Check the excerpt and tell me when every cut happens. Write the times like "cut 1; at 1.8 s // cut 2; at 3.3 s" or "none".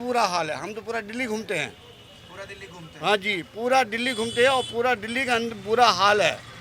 none